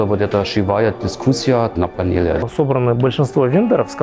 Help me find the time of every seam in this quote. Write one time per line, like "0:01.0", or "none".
0:02.4